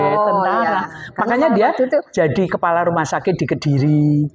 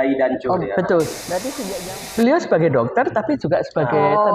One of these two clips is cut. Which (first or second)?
second